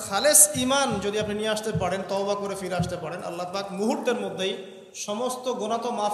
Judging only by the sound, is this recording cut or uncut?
uncut